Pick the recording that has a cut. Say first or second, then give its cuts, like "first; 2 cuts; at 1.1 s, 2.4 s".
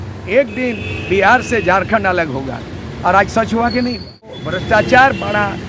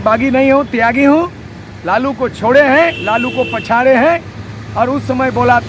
first; 1 cut; at 4.5 s